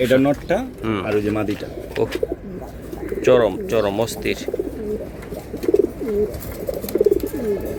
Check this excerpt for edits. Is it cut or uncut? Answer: uncut